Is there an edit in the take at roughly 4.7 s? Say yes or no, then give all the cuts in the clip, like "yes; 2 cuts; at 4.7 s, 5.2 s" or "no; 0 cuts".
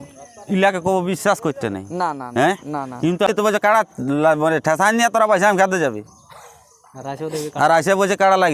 no; 1 cut; at 3.3 s